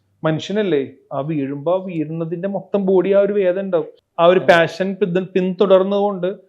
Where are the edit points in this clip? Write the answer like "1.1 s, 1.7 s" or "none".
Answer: 4.0 s